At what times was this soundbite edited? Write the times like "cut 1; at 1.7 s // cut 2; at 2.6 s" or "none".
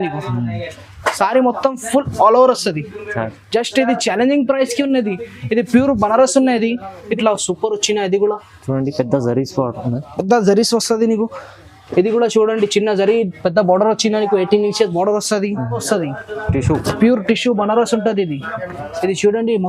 cut 1; at 7.1 s // cut 2; at 15.8 s